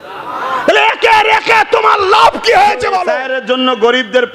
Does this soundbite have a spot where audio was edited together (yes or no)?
yes